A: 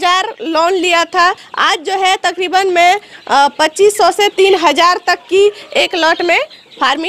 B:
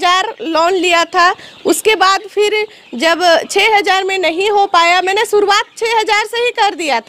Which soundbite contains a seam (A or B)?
A